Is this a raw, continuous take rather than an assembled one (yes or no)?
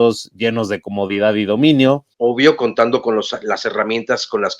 no